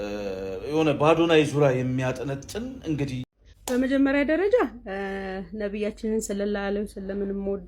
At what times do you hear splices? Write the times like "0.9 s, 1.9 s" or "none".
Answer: 3.3 s